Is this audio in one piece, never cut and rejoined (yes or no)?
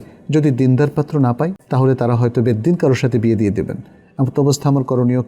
no